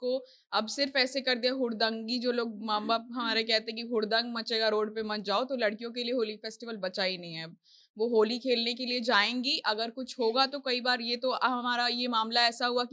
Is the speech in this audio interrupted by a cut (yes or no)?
no